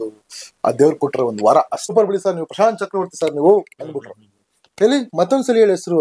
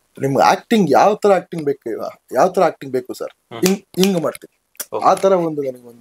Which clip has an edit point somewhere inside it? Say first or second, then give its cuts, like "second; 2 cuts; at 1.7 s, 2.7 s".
first; 1 cut; at 1.9 s